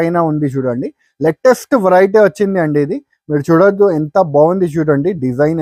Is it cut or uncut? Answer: uncut